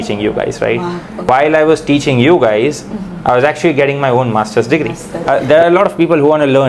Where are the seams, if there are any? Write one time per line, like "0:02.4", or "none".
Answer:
0:01.3
0:05.1